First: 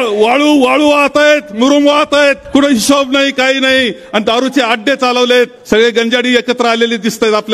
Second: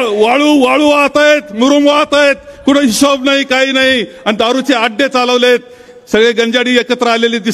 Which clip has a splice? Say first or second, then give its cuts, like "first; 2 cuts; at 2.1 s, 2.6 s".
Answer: first; 2 cuts; at 2.4 s, 5.6 s